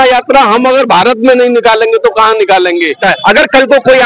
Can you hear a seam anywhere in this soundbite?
yes; 1 cut; at 3.0 s

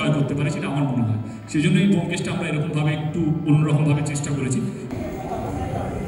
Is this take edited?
no; 0 cuts

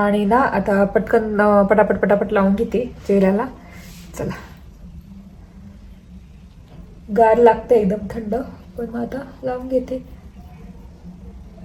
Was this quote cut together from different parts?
no; 0 cuts

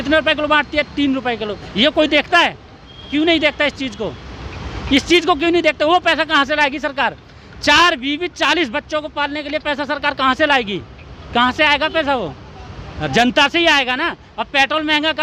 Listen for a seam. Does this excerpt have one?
no; 0 cuts

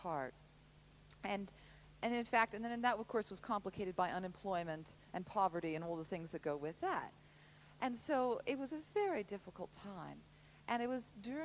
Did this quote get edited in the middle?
yes; 1 cut; at 2.6 s

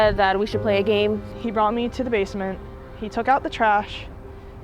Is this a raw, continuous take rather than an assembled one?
no; 1 cut; at 1.3 s

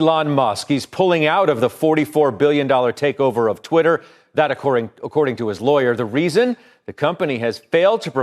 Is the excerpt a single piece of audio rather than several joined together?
yes; 0 cuts

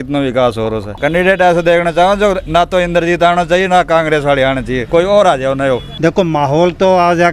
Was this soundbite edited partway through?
yes; 3 cuts; at 0.9 s, 4.8 s, 5.9 s

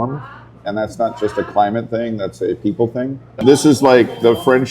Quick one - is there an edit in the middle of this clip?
yes; 1 cut; at 3.3 s

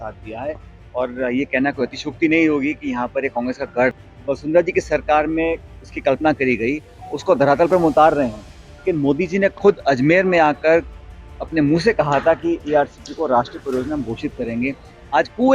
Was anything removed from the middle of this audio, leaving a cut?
yes; 1 cut; at 4.0 s

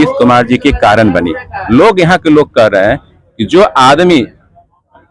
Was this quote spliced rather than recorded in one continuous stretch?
yes; 1 cut; at 1.5 s

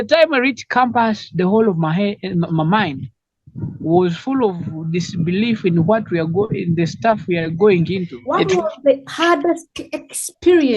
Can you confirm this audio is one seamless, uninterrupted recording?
no; 1 cut; at 8.1 s

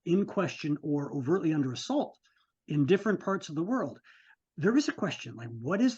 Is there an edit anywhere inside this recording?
no; 0 cuts

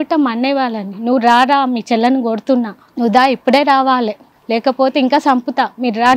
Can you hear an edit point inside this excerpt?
no; 0 cuts

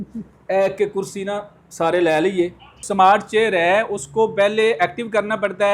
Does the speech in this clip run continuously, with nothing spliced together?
no; 1 cut; at 2.8 s

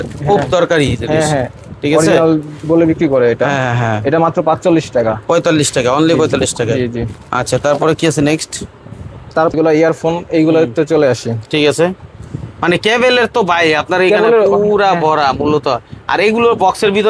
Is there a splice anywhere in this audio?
no; 0 cuts

